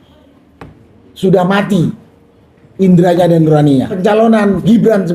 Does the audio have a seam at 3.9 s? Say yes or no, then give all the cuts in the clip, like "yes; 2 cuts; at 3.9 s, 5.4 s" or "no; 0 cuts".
yes; 1 cut; at 3.9 s